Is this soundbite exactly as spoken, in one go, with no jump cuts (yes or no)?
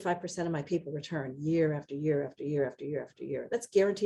yes